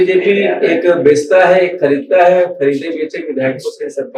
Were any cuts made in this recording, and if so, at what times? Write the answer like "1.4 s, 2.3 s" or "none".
none